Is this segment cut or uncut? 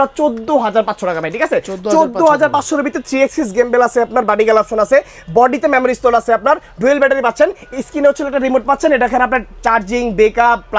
uncut